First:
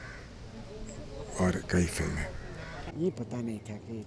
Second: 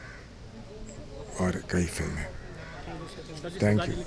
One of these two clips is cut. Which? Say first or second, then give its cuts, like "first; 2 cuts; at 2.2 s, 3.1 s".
first; 1 cut; at 2.8 s